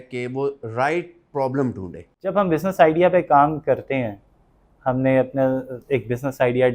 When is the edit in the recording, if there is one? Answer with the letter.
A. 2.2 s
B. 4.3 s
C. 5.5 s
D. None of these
A